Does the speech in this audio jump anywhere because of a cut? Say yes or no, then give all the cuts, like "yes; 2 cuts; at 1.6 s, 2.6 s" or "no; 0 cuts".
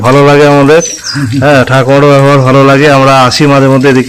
no; 0 cuts